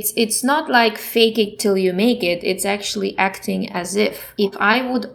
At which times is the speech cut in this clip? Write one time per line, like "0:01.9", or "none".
0:01.0
0:04.2